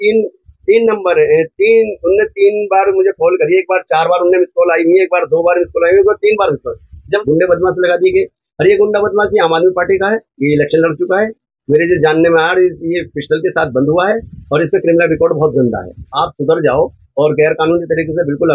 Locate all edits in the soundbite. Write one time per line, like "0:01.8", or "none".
0:07.2
0:16.0